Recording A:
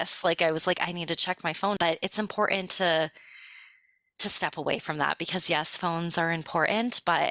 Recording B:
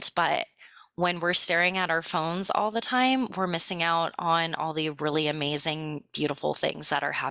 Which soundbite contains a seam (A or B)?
A